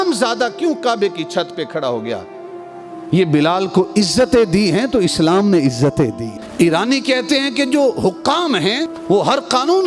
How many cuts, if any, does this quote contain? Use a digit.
1